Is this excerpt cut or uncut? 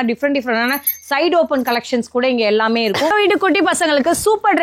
cut